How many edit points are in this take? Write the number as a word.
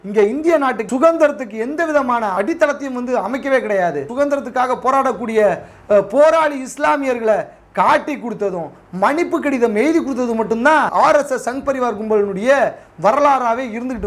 three